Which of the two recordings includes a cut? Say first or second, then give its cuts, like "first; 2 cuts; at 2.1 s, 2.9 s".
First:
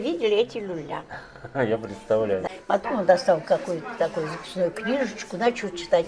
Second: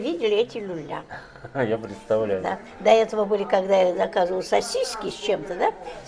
first; 1 cut; at 2.5 s